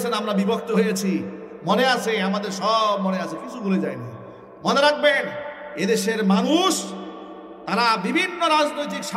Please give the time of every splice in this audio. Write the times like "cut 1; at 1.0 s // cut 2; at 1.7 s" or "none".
none

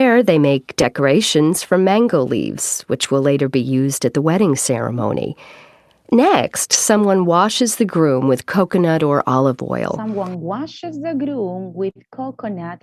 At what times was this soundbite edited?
none

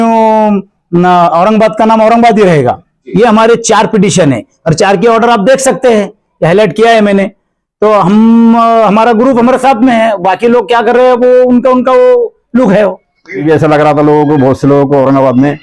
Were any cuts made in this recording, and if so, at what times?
cut 1; at 3.0 s // cut 2; at 13.4 s

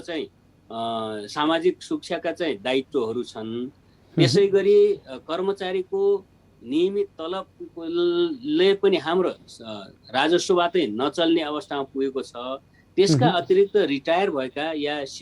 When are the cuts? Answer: none

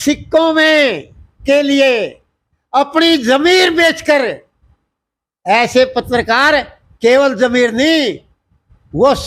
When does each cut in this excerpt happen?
none

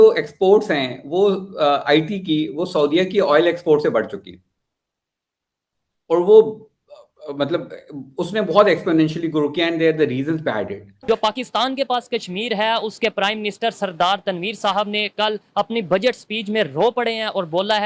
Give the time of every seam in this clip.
cut 1; at 10.9 s

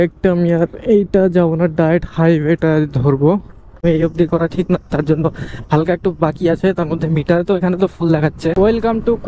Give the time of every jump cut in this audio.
cut 1; at 3.8 s // cut 2; at 8.5 s

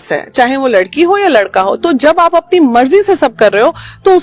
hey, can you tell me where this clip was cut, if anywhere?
none

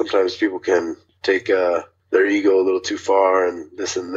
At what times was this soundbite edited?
cut 1; at 1.1 s // cut 2; at 1.9 s

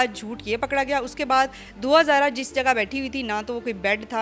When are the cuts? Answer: none

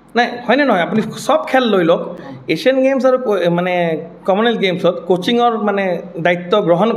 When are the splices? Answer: none

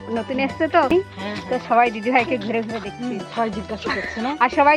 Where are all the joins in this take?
cut 1; at 0.9 s

